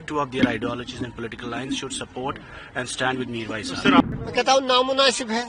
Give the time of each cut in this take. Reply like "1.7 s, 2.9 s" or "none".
4.0 s